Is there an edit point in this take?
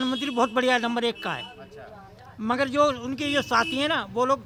no; 0 cuts

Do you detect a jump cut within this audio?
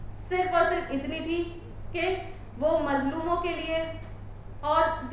no; 0 cuts

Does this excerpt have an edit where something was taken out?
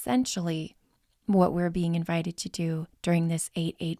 no; 0 cuts

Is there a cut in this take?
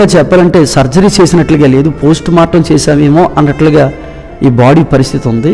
no; 0 cuts

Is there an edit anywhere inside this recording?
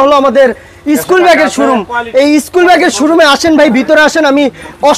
no; 0 cuts

